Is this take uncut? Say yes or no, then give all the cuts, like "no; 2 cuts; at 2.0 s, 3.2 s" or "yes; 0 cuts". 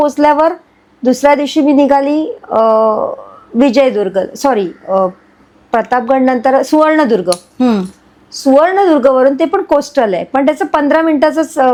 yes; 0 cuts